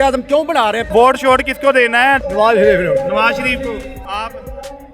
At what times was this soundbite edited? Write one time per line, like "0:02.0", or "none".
0:00.8
0:02.2
0:04.0